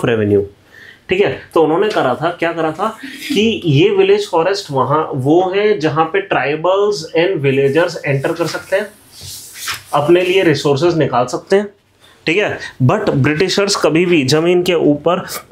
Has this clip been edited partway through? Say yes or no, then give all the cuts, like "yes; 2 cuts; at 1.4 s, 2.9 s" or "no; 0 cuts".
no; 0 cuts